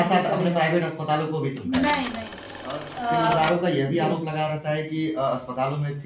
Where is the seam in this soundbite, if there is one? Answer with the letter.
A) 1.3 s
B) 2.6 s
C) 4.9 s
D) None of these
B